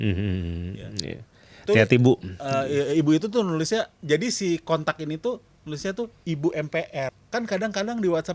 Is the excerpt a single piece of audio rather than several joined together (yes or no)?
no